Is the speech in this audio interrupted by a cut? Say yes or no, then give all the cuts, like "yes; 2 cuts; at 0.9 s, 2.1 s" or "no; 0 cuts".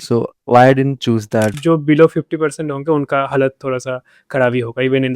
yes; 1 cut; at 1.5 s